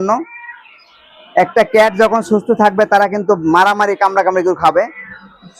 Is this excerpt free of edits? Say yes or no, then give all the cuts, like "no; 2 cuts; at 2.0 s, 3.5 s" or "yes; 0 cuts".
yes; 0 cuts